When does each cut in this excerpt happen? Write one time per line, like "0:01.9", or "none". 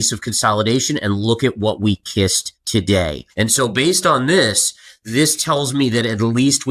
0:02.5
0:03.2